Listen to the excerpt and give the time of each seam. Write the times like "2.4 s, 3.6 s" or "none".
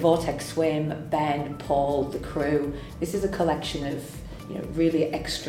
2.9 s